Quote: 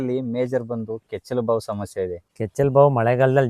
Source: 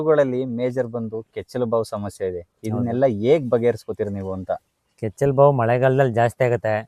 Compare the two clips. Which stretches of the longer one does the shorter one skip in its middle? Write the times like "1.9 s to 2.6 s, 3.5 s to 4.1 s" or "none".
2.5 s to 4.9 s